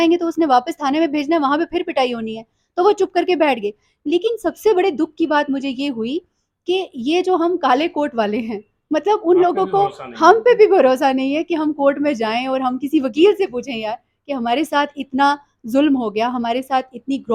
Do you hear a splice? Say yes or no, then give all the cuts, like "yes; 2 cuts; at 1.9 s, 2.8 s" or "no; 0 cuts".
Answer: no; 0 cuts